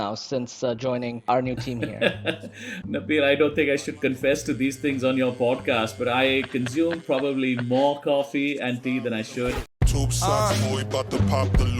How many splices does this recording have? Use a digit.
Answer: 2